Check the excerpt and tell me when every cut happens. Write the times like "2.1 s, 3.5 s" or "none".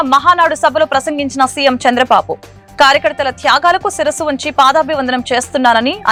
none